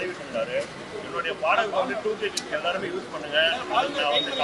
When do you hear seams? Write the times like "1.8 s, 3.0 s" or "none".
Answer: none